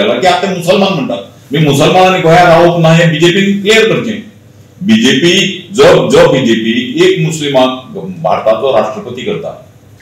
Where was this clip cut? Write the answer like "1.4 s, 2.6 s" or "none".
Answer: none